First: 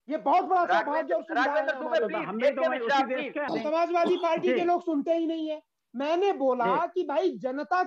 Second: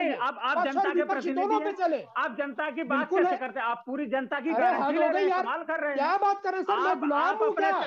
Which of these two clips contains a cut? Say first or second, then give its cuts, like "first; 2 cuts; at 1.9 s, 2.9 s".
first; 1 cut; at 3.5 s